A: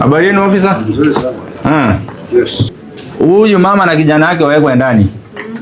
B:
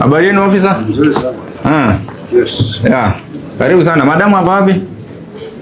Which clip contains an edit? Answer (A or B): A